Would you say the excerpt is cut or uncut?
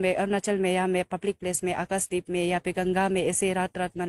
uncut